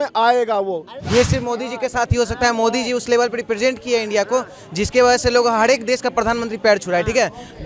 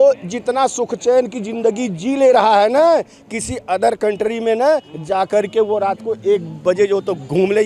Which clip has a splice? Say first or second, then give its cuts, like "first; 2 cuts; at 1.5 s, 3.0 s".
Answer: first; 1 cut; at 0.9 s